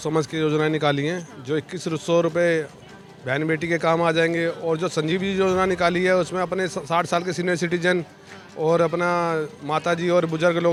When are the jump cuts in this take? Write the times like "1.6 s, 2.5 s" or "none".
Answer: none